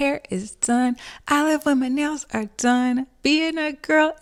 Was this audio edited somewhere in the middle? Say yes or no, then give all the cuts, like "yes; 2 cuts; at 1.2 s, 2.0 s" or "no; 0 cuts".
no; 0 cuts